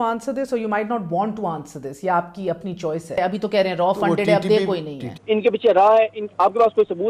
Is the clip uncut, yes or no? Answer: no